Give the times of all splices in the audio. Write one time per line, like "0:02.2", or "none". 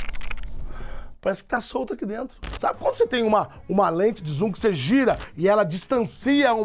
0:02.4